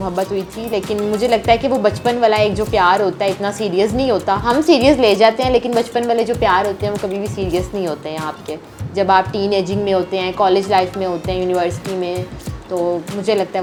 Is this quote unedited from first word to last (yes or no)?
yes